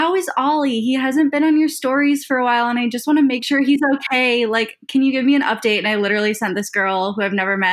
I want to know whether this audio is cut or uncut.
uncut